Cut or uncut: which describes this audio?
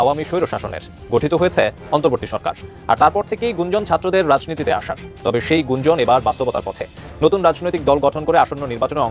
uncut